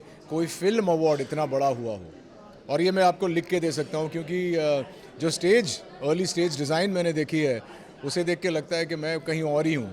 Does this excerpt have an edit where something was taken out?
no; 0 cuts

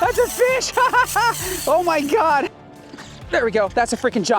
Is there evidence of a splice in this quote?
yes; 1 cut; at 2.6 s

